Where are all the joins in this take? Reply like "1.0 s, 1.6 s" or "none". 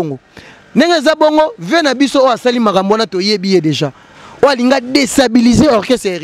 none

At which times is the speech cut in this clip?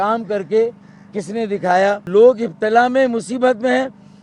2.1 s

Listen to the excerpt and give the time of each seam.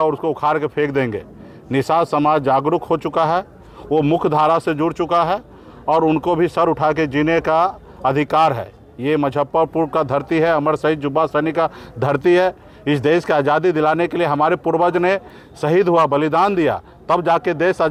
none

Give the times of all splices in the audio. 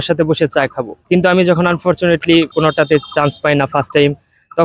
2.5 s

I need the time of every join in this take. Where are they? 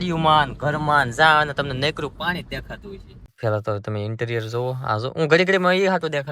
3.2 s

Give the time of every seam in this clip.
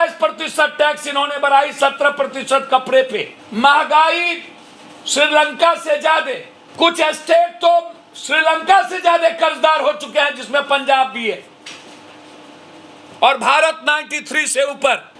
none

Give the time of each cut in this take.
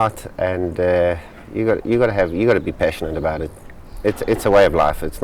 none

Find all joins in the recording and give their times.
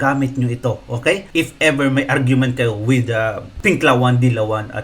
1.2 s, 3.5 s

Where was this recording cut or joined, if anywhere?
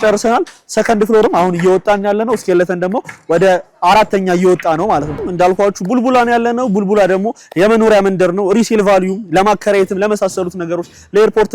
5.2 s

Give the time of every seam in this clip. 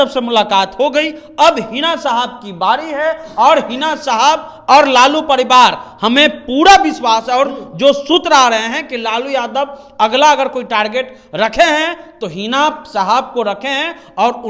none

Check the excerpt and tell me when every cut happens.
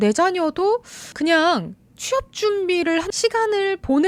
none

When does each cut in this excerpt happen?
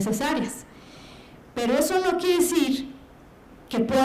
2.2 s

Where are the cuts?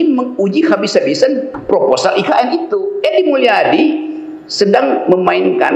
2.8 s

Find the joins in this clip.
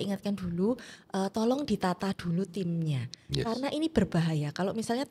none

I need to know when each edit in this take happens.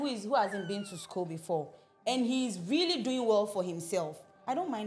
none

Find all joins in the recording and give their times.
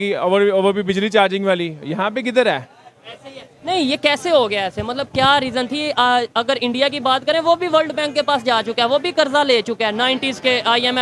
none

